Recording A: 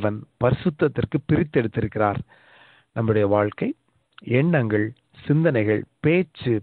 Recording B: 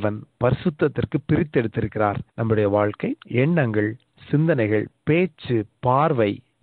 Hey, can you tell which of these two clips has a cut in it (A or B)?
B